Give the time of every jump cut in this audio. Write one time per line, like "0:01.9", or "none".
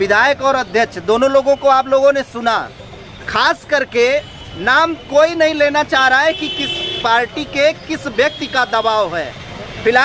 none